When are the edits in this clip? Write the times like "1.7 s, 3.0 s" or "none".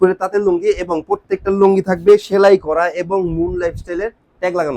none